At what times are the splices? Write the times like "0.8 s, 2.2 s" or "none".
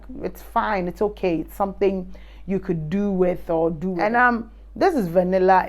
4.0 s

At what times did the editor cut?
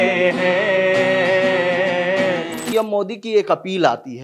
2.7 s

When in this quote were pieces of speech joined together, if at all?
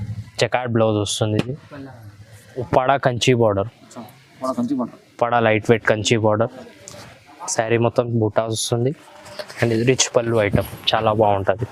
2.7 s

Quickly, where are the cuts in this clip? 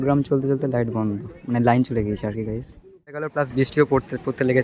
3.3 s

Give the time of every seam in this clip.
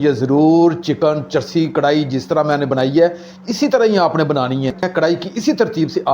4.9 s

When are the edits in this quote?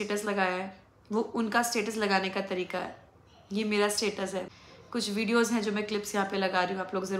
4.5 s

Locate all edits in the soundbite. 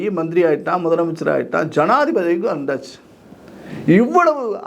none

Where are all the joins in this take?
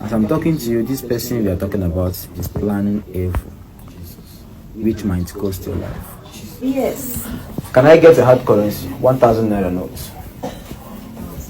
6.6 s

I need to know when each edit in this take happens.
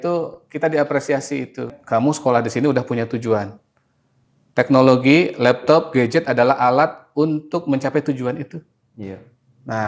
1.7 s

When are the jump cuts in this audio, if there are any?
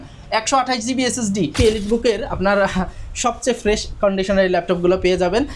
1.5 s

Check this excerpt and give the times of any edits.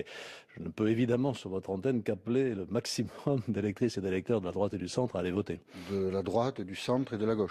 none

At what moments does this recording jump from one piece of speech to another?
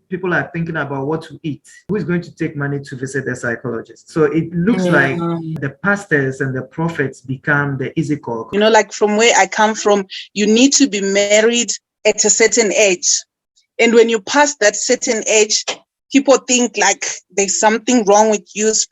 1.9 s, 5.5 s, 8.4 s

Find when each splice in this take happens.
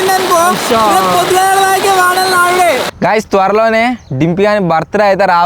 2.9 s

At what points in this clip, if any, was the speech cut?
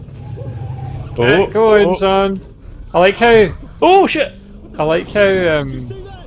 1.1 s

